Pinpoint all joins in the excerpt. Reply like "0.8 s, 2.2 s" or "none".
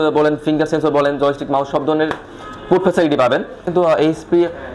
3.7 s